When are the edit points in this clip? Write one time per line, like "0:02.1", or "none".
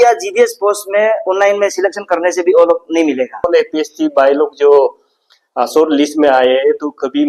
0:03.4